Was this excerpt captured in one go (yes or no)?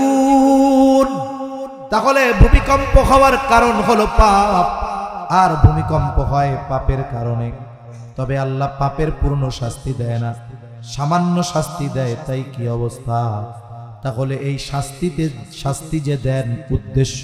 yes